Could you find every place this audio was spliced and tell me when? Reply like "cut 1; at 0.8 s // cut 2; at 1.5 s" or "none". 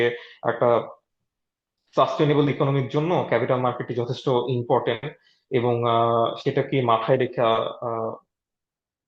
none